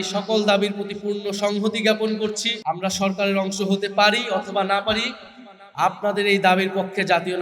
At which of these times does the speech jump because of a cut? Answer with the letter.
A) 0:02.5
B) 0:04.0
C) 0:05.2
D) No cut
A